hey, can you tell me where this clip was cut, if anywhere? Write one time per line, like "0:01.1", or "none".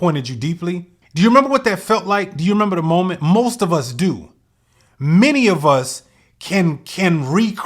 0:01.0